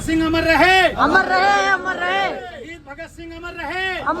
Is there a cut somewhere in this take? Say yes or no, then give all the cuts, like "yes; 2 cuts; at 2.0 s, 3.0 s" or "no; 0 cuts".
no; 0 cuts